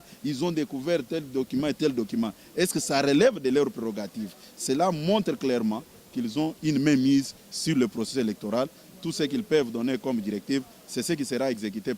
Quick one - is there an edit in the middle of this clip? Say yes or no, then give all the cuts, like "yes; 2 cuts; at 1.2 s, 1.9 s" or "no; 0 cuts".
no; 0 cuts